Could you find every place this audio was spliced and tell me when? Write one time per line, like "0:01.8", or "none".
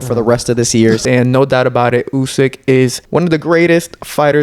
0:01.0
0:03.0

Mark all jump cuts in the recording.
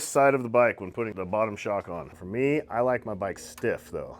0:02.1

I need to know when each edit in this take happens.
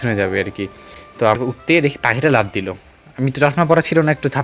0:01.2

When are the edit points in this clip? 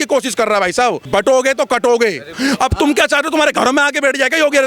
0:01.0
0:02.3

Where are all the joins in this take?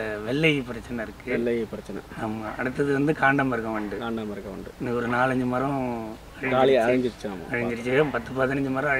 none

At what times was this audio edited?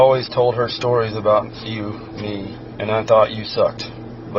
0:02.6

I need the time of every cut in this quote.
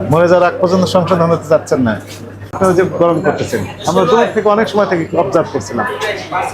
0:02.6

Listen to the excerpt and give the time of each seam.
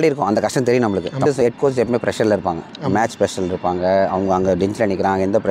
0:01.2

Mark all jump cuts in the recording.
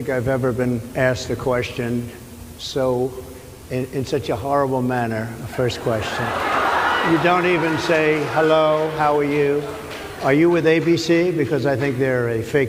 none

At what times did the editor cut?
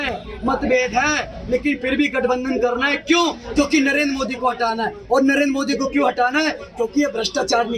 none

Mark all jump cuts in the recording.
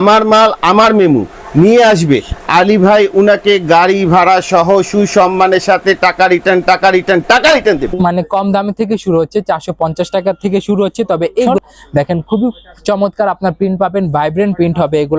0:07.9
0:11.5

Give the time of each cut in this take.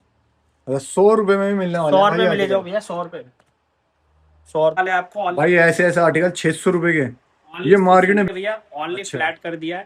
0:04.8
0:08.3

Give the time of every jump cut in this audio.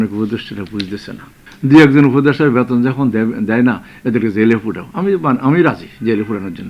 0:01.4

